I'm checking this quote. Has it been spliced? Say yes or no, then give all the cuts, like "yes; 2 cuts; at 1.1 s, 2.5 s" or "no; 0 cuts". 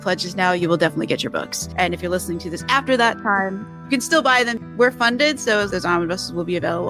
yes; 1 cut; at 5.7 s